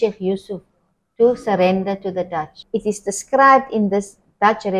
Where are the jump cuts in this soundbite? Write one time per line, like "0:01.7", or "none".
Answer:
0:02.6

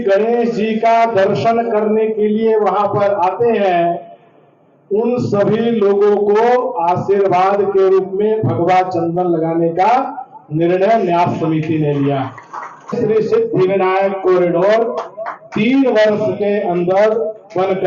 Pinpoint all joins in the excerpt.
0:12.9

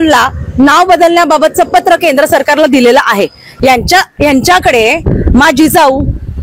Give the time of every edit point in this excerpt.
0:03.4

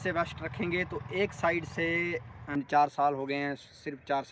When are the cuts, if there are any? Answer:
0:02.5

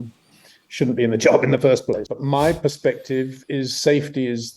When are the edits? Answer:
0:02.1

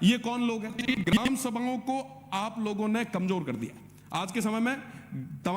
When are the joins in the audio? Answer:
0:01.1

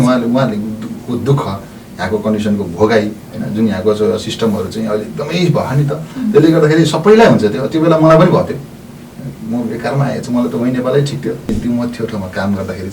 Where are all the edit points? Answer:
0:11.5

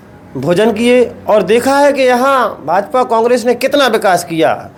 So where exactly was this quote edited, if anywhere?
none

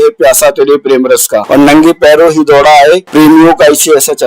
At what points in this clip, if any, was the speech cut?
0:01.4
0:03.1

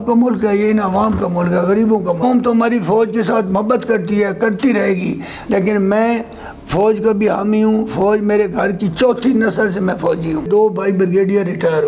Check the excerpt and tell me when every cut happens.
0:02.2
0:05.3
0:10.5

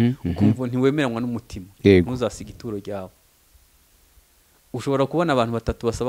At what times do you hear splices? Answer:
none

